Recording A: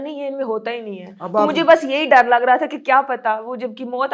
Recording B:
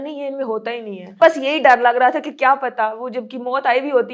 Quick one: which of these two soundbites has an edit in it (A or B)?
B